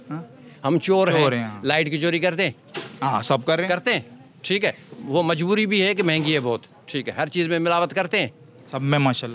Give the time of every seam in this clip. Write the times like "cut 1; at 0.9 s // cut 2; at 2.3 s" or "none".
none